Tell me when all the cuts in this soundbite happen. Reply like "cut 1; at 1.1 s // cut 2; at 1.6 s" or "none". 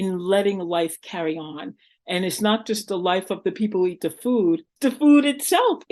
cut 1; at 4.7 s